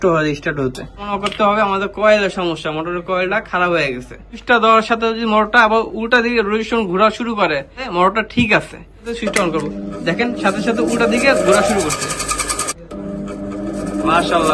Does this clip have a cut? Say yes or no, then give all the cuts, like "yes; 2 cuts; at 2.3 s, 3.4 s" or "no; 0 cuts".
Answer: yes; 5 cuts; at 1.1 s, 4.3 s, 7.9 s, 9.1 s, 12.7 s